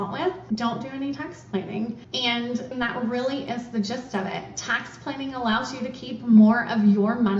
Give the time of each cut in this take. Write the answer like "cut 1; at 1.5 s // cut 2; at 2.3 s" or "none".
none